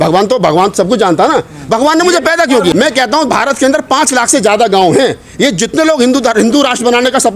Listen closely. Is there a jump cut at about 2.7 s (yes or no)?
yes